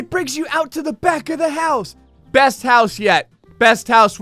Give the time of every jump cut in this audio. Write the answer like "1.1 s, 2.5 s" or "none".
none